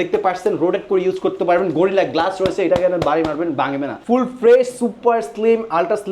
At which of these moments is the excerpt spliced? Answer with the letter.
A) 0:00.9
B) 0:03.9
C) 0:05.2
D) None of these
B